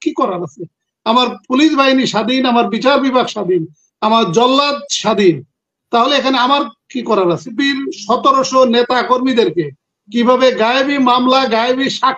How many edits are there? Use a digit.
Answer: 1